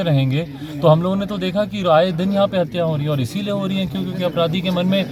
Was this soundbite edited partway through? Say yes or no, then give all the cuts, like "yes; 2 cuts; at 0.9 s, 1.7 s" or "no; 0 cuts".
no; 0 cuts